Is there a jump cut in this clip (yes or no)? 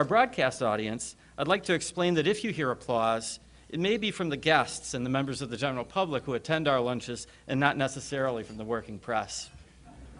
no